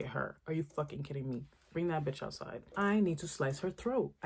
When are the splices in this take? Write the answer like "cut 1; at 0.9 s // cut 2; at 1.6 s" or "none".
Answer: cut 1; at 2.7 s